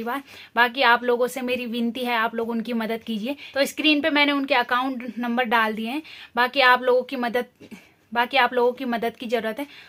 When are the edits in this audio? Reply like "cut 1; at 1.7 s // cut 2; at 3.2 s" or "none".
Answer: none